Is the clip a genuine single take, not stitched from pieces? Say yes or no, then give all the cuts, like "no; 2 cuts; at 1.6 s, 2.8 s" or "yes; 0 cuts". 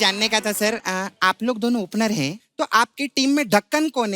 no; 1 cut; at 2.4 s